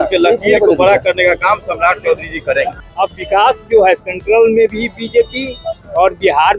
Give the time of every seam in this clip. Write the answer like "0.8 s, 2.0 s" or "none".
2.8 s